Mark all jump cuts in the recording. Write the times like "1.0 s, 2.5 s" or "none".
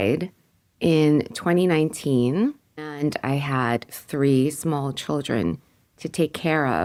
none